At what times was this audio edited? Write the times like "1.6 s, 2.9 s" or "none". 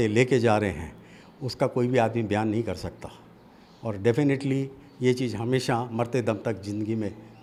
none